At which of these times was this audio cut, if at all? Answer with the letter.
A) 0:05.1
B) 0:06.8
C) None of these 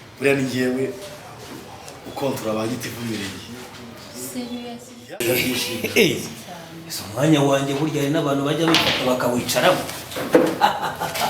A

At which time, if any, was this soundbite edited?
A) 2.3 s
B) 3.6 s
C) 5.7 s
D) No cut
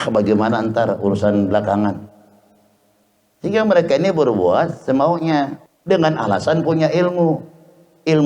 C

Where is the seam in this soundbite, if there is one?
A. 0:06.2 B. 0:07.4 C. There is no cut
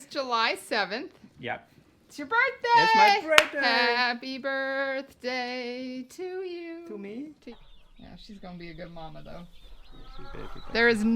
B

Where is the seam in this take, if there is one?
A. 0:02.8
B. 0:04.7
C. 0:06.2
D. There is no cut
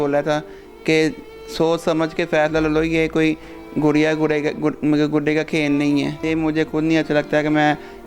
C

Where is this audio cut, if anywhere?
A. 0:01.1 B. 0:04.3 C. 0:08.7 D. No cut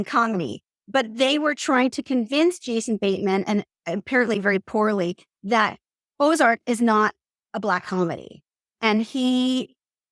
C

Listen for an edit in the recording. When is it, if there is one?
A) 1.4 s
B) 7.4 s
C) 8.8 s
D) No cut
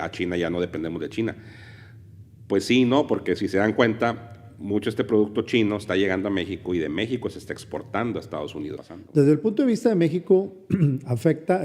C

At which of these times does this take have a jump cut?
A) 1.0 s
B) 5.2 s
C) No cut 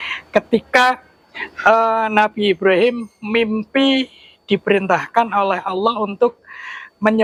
C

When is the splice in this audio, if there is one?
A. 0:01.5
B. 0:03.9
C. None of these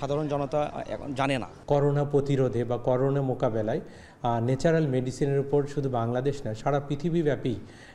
A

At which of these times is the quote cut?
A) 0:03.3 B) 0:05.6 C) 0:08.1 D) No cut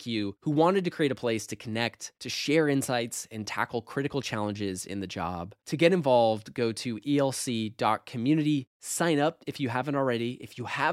D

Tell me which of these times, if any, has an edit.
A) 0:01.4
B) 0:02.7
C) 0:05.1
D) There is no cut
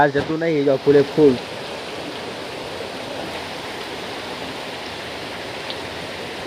D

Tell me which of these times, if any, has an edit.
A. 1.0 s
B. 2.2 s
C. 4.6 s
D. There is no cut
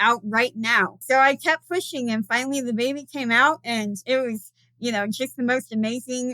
A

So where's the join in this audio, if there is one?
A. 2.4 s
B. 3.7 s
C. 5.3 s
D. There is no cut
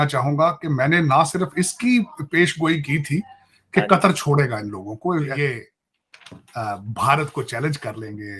C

